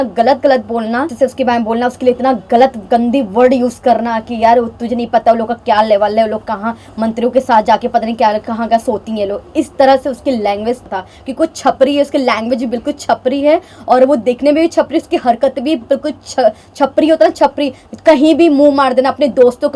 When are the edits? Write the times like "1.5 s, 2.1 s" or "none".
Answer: 1.1 s, 10.8 s